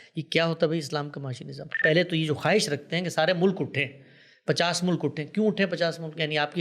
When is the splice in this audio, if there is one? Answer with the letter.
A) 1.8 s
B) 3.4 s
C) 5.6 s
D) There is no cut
A